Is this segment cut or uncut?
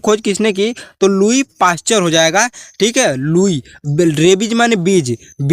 uncut